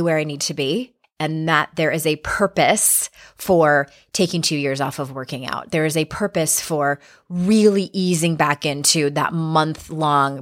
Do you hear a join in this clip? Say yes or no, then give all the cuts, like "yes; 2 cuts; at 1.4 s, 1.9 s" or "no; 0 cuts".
yes; 1 cut; at 1.0 s